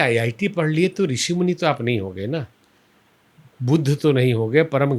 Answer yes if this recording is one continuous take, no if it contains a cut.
yes